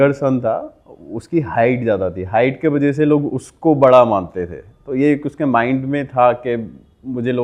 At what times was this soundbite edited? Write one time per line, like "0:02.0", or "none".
none

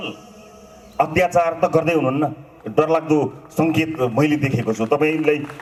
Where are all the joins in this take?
none

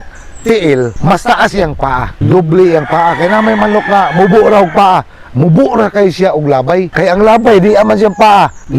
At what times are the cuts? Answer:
0:00.9
0:02.2
0:06.9

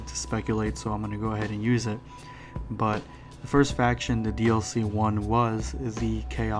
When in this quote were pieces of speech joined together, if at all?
0:03.4

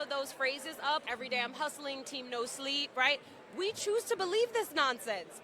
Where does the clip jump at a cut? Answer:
0:01.0

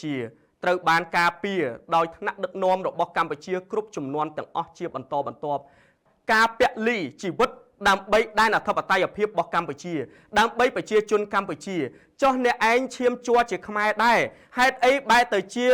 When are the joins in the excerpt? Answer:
0:06.0

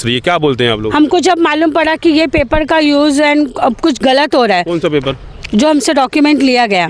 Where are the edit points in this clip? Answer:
none

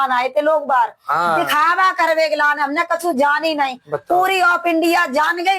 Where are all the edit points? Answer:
none

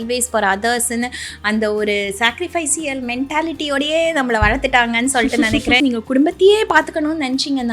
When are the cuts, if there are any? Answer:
0:05.8

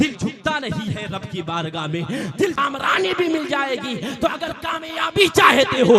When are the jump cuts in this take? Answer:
0:02.6

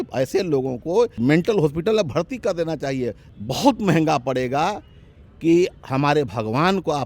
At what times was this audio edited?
0:01.2
0:03.3

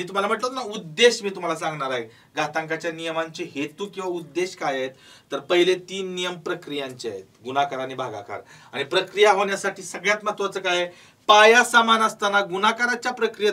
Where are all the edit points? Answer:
none

